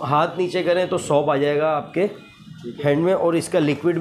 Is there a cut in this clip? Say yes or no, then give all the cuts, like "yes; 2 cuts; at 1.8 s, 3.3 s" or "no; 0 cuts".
no; 0 cuts